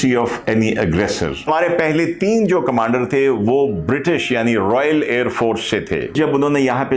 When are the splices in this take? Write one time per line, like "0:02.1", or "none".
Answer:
0:01.5
0:06.1